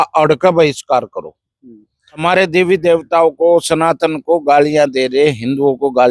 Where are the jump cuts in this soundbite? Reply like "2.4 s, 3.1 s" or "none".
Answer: 2.2 s